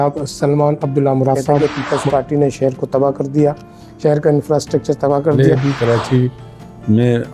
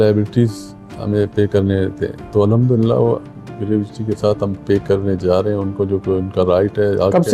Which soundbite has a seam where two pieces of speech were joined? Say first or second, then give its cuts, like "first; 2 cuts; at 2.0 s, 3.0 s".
first; 2 cuts; at 1.5 s, 5.4 s